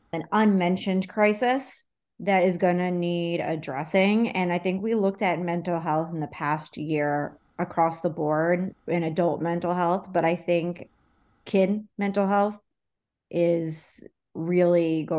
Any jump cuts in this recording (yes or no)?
no